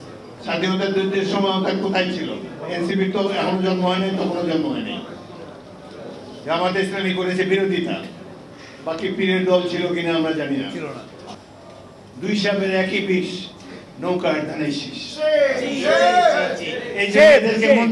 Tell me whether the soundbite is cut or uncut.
cut